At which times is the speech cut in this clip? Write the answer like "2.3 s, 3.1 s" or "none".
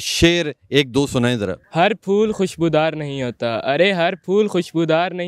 1.6 s